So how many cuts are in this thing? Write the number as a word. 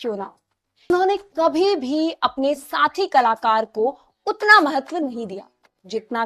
one